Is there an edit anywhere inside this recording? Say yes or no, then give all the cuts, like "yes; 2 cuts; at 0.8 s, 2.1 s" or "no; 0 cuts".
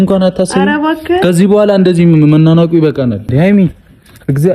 yes; 1 cut; at 3.3 s